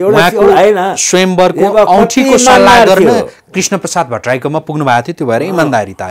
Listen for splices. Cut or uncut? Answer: uncut